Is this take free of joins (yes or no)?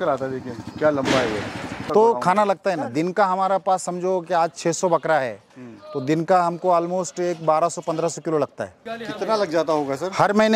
no